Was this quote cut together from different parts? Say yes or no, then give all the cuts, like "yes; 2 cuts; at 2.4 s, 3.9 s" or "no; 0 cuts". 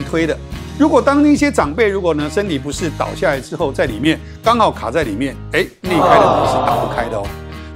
no; 0 cuts